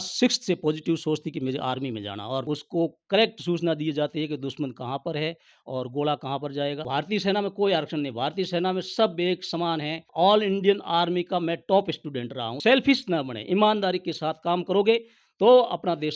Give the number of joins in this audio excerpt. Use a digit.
4